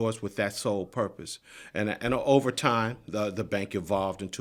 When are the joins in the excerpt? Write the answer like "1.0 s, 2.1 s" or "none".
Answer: none

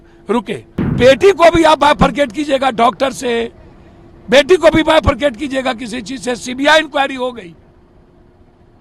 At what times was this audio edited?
0.9 s

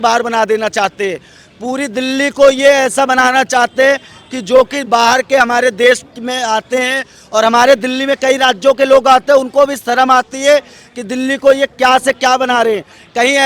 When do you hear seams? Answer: none

